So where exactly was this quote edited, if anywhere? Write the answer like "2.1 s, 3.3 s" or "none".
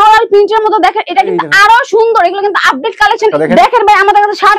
3.3 s

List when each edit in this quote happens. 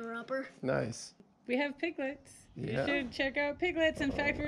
1.2 s

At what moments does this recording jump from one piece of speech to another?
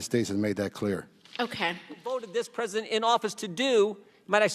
2.1 s

